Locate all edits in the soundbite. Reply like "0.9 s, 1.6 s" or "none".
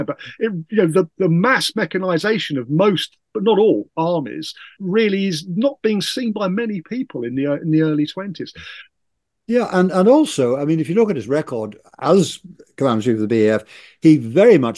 4.8 s, 8.9 s